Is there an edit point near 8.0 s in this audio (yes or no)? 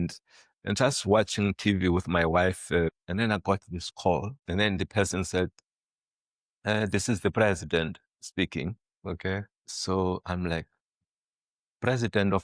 no